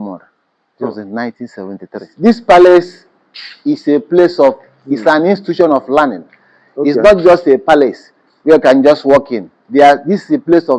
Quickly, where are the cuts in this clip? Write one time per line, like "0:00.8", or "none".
0:02.1